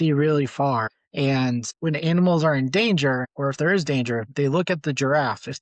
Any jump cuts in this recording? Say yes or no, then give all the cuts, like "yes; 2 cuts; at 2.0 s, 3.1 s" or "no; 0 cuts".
no; 0 cuts